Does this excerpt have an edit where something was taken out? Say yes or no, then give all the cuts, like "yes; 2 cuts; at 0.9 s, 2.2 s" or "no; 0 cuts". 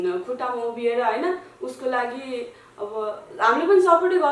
no; 0 cuts